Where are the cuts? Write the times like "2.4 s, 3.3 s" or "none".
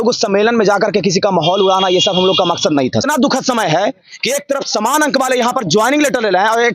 3.0 s

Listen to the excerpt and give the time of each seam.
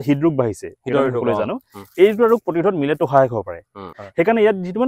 3.8 s

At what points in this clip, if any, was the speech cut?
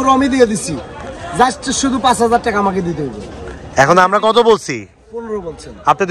none

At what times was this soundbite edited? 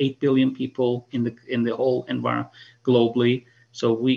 none

